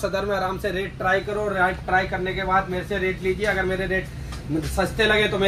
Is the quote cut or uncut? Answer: uncut